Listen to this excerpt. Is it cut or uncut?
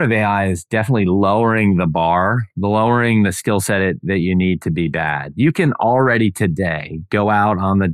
uncut